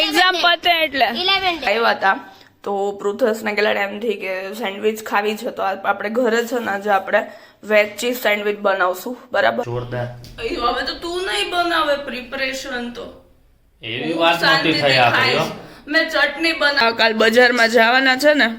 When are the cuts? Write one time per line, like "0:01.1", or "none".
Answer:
0:01.7
0:09.7
0:16.8